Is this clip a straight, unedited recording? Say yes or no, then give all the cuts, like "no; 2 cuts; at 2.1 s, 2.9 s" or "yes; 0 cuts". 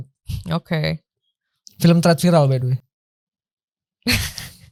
yes; 0 cuts